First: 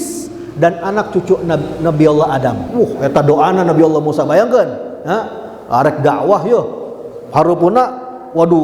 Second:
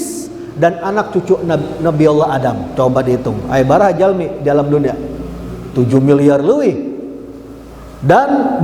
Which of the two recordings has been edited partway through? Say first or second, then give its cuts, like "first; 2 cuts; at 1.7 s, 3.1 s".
first; 1 cut; at 2.6 s